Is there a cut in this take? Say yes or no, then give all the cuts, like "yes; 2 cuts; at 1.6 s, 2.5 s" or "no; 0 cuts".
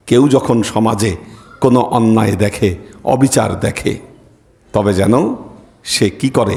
no; 0 cuts